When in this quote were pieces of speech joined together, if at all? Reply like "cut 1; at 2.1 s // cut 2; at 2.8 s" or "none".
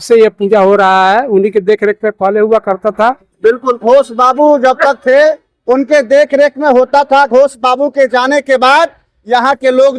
none

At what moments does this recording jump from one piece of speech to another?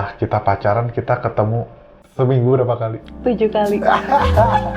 cut 1; at 2.0 s

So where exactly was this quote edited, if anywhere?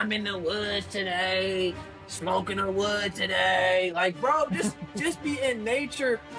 none

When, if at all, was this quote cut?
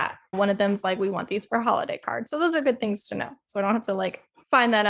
none

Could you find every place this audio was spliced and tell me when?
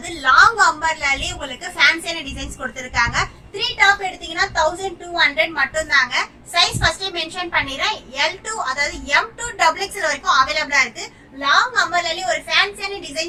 none

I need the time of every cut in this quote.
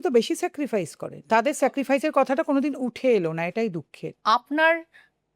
cut 1; at 1.2 s // cut 2; at 4.1 s

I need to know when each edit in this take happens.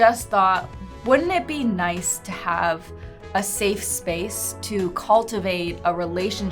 none

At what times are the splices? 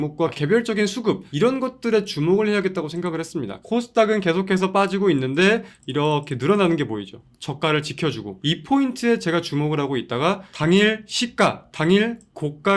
cut 1; at 1.3 s // cut 2; at 3.5 s

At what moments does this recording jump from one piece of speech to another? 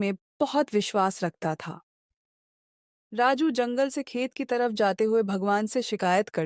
none

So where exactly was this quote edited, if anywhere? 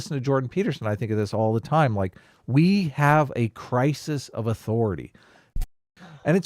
cut 1; at 5.5 s

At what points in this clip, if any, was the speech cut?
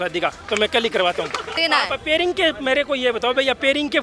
cut 1; at 1.5 s

